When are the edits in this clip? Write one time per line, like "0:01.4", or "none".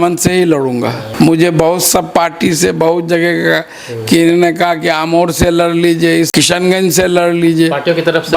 0:01.0
0:06.3